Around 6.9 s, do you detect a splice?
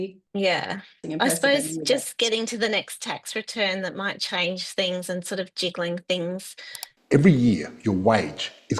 yes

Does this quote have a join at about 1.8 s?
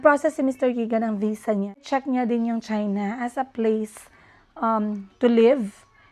yes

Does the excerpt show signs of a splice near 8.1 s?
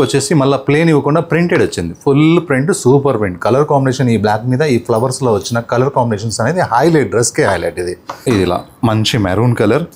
yes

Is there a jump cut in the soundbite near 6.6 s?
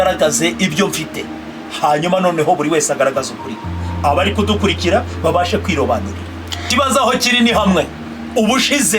yes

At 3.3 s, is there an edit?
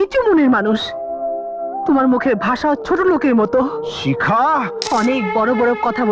no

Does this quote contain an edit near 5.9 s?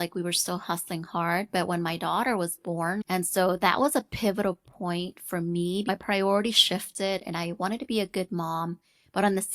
yes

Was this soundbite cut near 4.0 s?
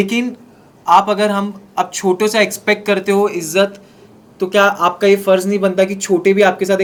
no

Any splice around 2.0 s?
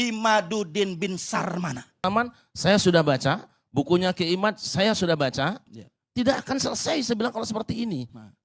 yes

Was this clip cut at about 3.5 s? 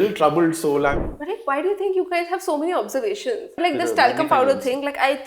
no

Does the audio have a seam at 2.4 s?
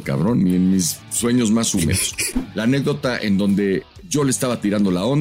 yes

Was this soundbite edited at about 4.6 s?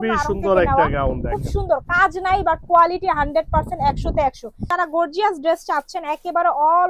yes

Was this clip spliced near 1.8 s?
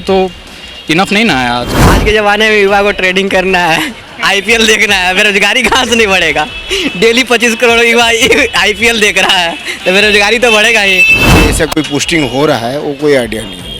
yes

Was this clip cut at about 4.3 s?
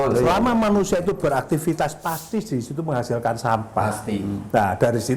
no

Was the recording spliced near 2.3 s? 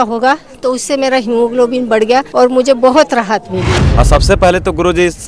yes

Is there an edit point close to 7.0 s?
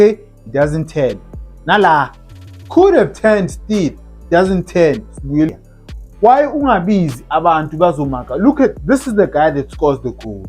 no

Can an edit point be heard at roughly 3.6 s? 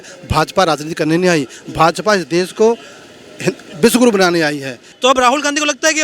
no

